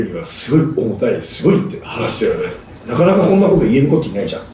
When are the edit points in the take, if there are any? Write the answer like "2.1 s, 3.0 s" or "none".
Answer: none